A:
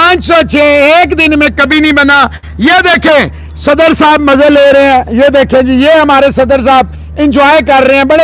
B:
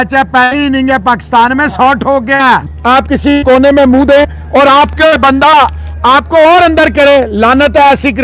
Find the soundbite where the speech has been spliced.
B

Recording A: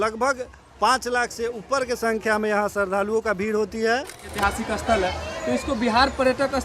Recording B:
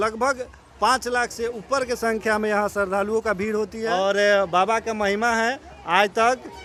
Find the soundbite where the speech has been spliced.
A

